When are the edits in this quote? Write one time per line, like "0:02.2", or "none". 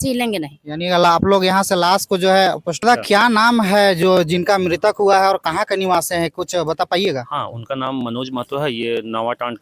0:02.8